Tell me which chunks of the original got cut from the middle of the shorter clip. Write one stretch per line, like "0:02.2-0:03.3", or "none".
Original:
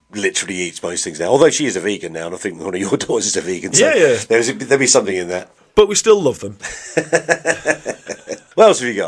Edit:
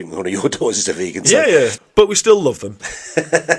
0:04.2-0:05.5